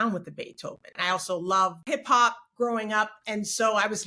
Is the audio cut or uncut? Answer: cut